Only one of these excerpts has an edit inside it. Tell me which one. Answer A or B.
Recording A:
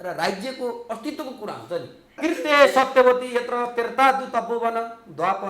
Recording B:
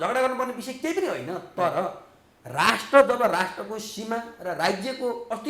A